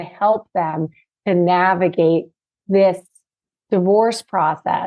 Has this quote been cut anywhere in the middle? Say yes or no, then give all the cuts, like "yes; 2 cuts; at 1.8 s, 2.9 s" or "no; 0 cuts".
no; 0 cuts